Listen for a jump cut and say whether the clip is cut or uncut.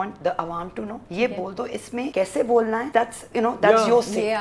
cut